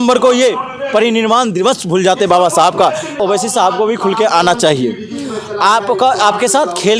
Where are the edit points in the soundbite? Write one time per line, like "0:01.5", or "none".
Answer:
0:03.2